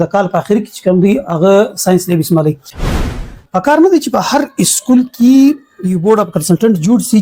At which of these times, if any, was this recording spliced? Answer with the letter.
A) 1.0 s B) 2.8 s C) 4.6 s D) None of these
B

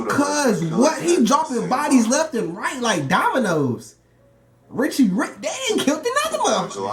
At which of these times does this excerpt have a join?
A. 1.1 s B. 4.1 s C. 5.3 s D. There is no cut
D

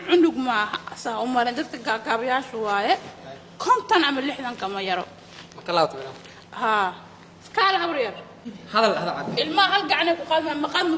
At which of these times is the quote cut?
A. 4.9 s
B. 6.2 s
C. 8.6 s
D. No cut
C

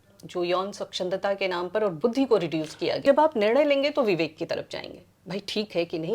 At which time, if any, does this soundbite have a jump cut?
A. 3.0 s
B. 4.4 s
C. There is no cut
A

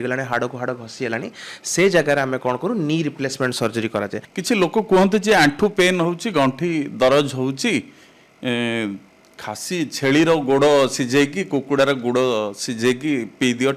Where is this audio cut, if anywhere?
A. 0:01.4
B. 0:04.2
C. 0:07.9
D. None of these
B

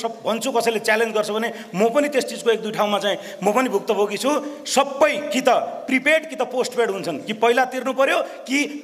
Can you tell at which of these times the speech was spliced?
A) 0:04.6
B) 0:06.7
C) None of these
C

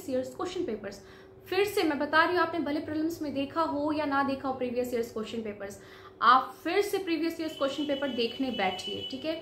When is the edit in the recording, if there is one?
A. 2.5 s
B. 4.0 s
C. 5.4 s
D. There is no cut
D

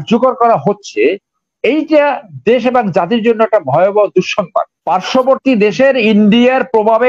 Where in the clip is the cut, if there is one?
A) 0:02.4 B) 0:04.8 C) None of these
B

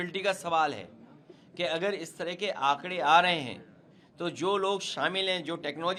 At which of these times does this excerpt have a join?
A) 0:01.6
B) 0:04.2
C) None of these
C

